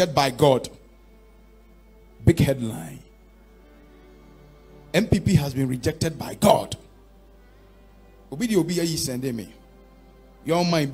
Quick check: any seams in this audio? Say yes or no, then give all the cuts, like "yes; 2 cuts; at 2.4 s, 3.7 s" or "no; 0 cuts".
no; 0 cuts